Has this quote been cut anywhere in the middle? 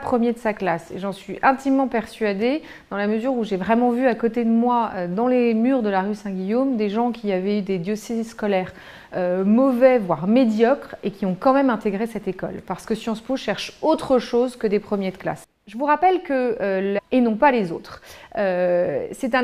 no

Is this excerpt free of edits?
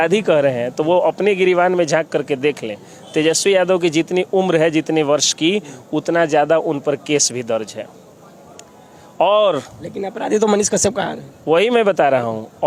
yes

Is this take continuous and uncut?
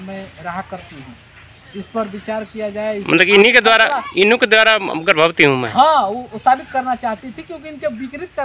no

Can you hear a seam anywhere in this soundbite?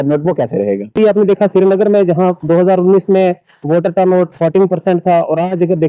yes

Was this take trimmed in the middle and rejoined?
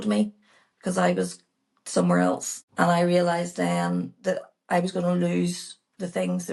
no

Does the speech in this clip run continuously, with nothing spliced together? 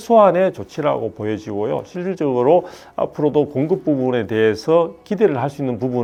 yes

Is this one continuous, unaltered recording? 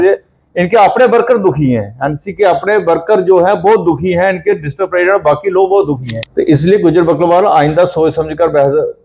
no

